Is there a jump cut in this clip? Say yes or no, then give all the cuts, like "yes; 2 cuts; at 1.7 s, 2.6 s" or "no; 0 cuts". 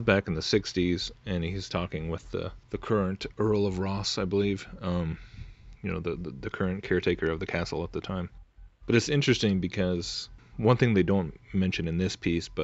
no; 0 cuts